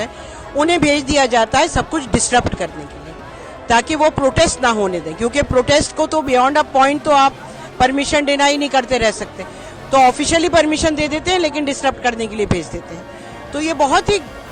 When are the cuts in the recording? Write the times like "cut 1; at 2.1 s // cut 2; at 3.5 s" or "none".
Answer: none